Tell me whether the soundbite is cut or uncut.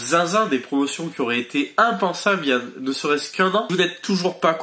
cut